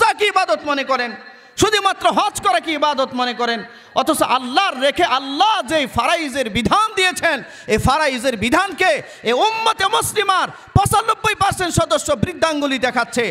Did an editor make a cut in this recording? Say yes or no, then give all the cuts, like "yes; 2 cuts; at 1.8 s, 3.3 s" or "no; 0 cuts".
no; 0 cuts